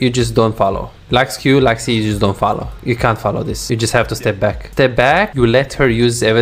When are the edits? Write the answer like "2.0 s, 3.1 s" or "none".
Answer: 0.9 s, 2.7 s, 3.6 s, 4.6 s, 5.3 s